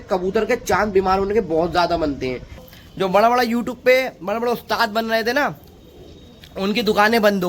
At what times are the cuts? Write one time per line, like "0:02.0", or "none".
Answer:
0:02.6